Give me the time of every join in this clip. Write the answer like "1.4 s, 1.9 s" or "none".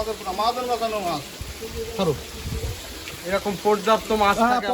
1.4 s, 3.1 s